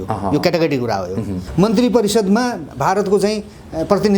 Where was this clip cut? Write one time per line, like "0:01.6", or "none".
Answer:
0:01.4